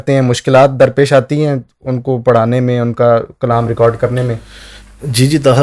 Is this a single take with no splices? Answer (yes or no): yes